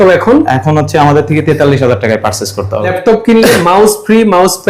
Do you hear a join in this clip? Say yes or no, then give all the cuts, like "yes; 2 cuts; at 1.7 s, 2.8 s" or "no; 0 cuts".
yes; 1 cut; at 2.9 s